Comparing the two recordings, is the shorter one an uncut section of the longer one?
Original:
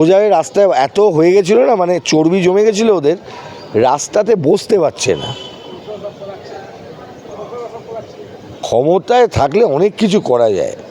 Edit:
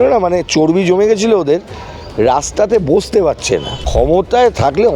no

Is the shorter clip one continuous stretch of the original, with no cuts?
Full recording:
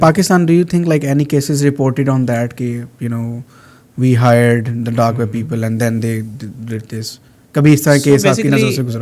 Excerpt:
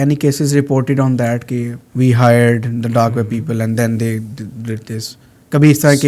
no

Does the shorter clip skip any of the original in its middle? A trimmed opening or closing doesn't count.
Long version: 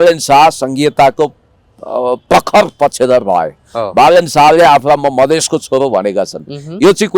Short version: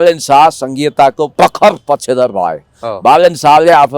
yes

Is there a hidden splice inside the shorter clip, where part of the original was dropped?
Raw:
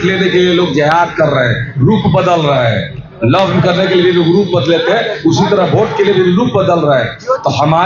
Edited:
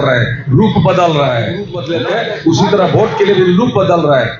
yes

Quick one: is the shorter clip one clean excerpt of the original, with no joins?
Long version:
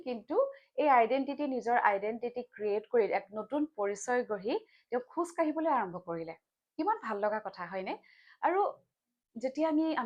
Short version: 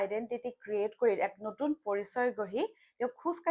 yes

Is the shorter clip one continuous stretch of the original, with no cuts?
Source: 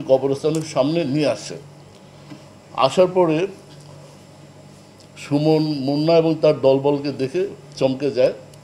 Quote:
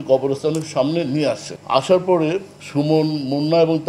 no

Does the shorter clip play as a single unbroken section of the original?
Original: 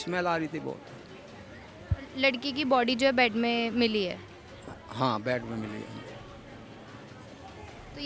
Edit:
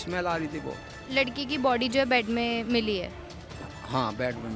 no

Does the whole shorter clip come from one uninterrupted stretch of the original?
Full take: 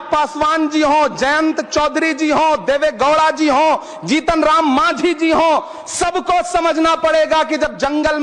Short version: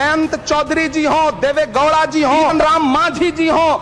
no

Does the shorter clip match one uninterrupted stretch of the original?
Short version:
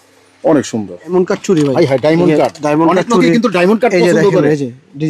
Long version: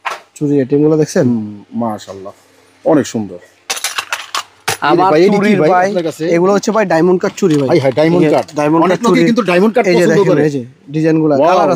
no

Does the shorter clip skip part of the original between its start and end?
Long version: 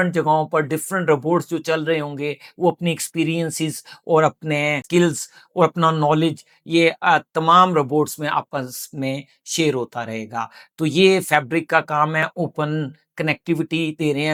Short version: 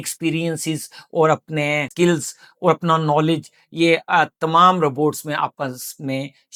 no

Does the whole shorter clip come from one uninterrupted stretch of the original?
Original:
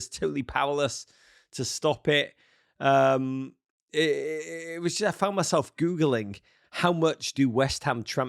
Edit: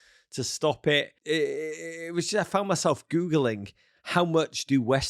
no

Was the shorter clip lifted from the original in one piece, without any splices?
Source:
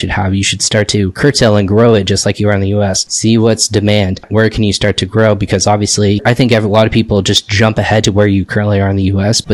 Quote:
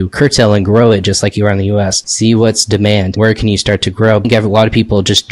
no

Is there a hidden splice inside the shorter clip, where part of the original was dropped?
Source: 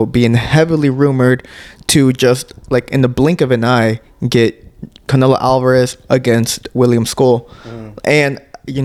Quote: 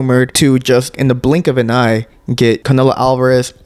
yes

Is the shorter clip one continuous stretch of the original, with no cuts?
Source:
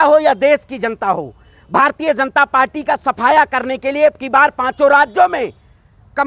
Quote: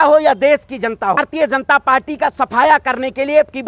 no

